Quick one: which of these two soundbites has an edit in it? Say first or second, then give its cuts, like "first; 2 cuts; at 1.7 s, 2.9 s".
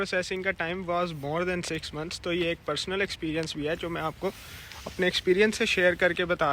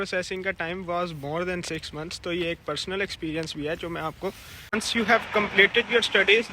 second; 1 cut; at 4.8 s